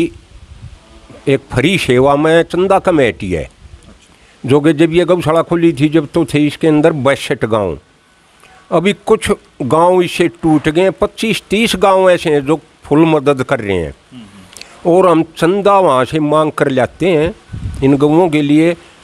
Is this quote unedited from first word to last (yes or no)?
yes